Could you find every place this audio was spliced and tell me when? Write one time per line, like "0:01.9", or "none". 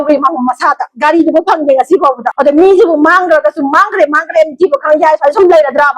0:02.3